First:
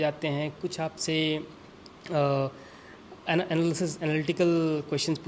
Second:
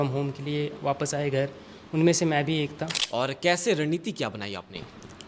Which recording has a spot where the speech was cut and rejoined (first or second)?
second